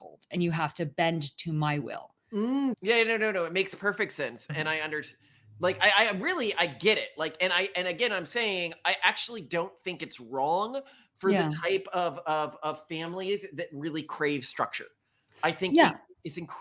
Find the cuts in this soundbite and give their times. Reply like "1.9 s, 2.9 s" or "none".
2.7 s